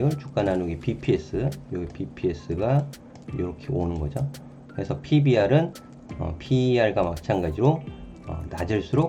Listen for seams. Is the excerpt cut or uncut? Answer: uncut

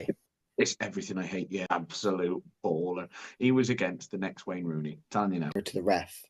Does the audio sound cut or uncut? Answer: cut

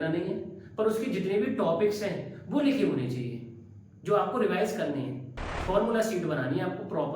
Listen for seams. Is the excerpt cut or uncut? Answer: cut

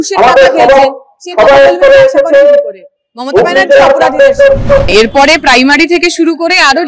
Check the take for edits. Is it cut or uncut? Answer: cut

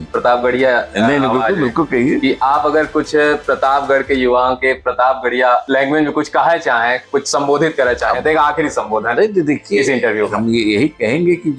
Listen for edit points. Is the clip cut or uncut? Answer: uncut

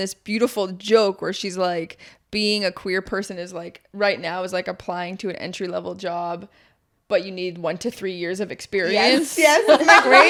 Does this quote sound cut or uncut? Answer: uncut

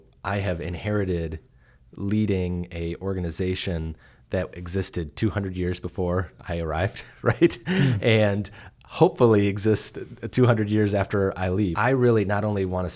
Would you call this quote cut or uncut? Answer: cut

